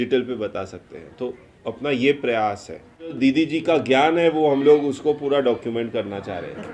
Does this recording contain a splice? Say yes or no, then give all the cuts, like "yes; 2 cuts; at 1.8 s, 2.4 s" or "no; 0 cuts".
yes; 1 cut; at 3.2 s